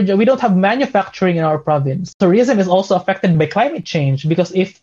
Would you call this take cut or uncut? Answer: cut